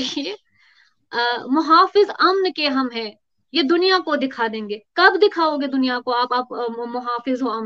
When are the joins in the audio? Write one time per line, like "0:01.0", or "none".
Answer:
none